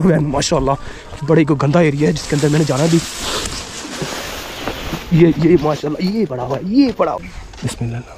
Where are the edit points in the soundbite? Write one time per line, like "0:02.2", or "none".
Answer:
0:07.2